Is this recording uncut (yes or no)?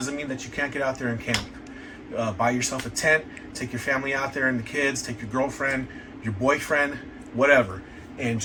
yes